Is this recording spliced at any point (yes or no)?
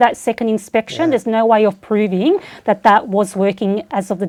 no